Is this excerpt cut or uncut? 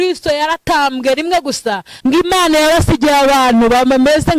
cut